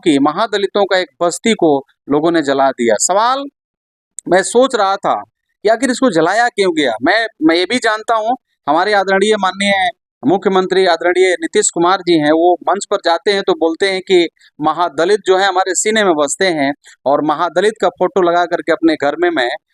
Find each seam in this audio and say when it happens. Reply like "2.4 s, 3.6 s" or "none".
none